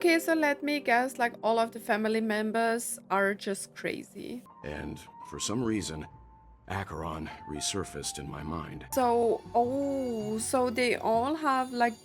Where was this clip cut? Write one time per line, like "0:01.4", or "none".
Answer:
0:04.5
0:08.9